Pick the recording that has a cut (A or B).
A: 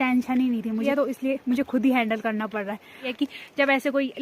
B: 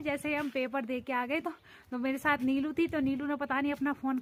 A